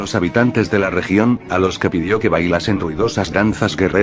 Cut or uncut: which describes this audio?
uncut